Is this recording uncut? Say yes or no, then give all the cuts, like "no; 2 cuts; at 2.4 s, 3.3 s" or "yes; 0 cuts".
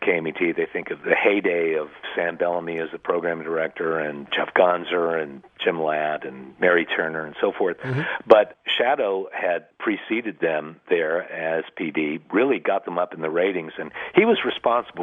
no; 4 cuts; at 0.9 s, 4.2 s, 8.5 s, 9.7 s